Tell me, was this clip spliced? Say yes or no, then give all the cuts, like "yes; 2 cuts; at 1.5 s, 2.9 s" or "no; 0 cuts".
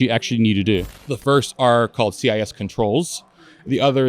yes; 1 cut; at 0.9 s